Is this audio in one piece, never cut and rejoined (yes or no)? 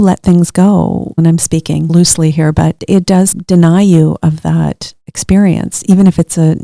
yes